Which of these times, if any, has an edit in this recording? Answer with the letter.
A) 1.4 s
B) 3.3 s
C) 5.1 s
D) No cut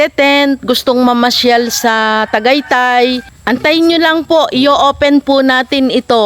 B